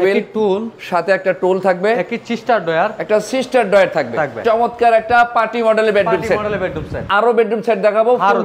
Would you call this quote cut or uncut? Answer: cut